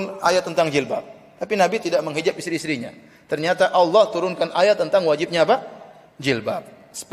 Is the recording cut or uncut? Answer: uncut